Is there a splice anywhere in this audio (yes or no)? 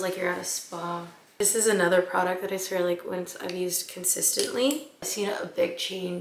yes